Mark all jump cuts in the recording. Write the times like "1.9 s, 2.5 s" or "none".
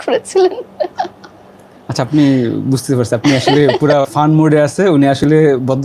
none

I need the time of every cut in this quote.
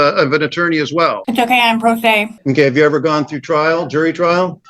2.3 s

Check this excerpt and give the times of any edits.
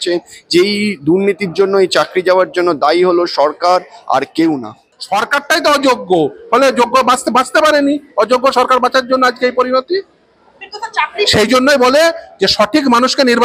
5.0 s

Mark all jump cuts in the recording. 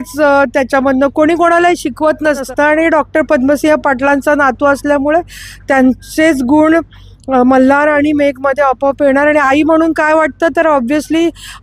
2.5 s

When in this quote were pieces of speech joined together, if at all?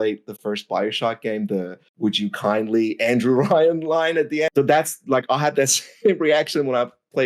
4.5 s

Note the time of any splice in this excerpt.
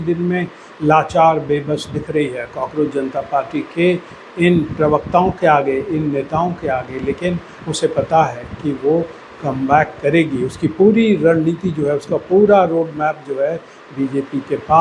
none

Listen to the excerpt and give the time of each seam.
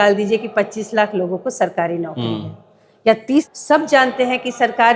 3.5 s

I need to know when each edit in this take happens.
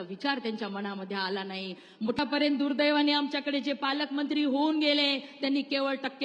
2.2 s

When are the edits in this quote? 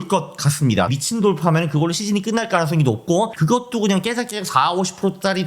0.9 s

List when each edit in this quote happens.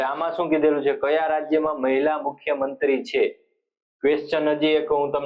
none

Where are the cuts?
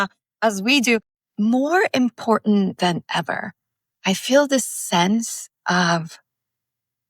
1.2 s

